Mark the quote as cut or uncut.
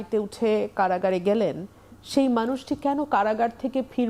uncut